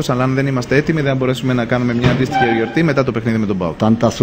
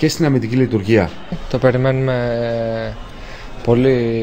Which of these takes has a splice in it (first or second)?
second